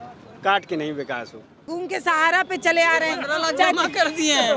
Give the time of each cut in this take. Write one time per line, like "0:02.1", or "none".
0:01.8